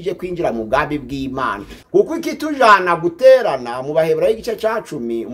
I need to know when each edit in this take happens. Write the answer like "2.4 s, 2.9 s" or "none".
1.7 s